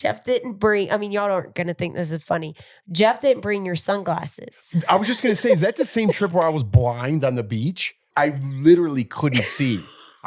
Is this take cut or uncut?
cut